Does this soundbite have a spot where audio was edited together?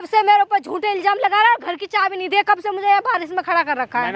no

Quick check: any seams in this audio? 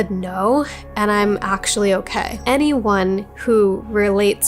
yes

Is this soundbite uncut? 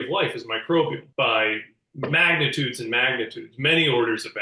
no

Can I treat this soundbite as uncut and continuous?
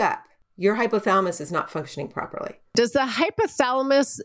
no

